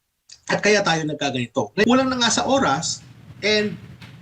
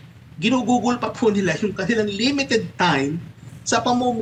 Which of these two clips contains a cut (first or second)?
first